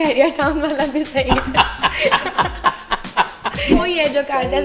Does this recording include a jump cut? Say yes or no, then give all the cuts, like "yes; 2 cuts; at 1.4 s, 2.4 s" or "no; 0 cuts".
yes; 1 cut; at 3.7 s